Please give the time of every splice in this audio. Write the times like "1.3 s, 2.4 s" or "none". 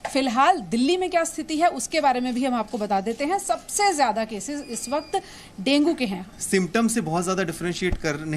6.2 s